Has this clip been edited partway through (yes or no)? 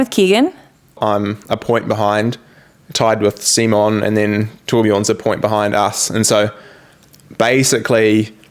yes